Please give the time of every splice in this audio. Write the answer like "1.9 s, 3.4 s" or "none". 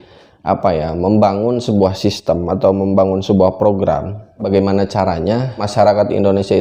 4.4 s